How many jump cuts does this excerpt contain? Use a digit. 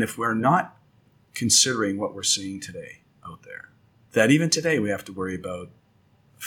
1